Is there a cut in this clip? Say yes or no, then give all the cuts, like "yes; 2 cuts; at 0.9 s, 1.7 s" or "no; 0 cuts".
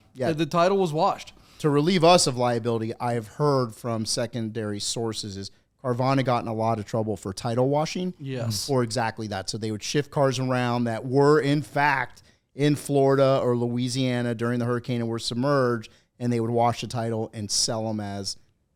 no; 0 cuts